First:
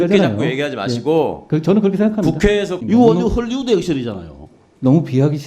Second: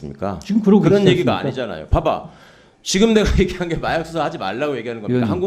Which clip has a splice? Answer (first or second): first